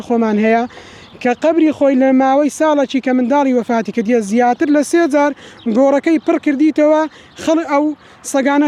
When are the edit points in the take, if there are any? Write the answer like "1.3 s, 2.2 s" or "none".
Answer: none